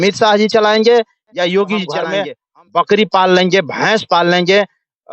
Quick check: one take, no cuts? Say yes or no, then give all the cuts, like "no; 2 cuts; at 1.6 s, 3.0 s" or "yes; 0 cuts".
no; 1 cut; at 2.1 s